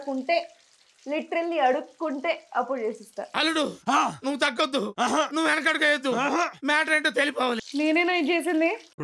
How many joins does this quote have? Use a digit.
1